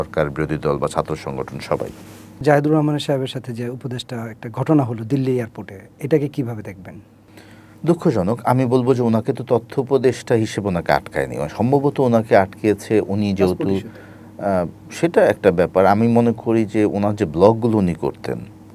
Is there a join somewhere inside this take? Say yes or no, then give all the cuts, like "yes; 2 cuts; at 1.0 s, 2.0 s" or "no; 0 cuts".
no; 0 cuts